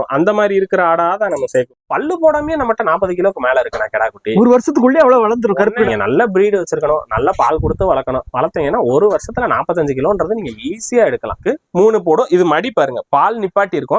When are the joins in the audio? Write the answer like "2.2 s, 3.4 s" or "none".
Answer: 1.7 s, 5.9 s, 11.4 s